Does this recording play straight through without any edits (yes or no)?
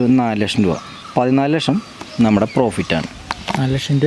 no